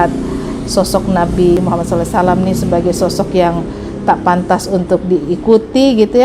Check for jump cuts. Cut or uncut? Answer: cut